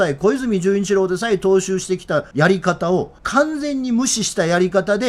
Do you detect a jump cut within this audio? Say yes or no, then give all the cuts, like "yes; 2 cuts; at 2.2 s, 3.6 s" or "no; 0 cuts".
yes; 2 cuts; at 2.3 s, 3.2 s